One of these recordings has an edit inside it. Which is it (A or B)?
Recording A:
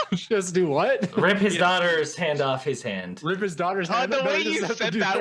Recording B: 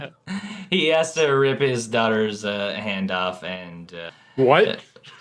B